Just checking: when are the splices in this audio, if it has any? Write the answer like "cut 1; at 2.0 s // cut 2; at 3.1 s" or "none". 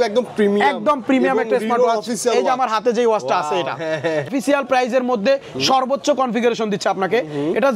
cut 1; at 4.3 s